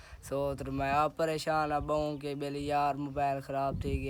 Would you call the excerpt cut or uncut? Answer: uncut